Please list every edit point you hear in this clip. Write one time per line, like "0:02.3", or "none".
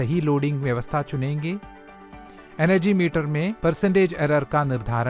0:03.5